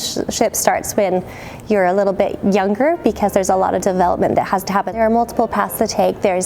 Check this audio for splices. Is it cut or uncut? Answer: cut